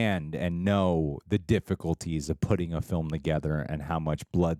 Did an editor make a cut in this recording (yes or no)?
no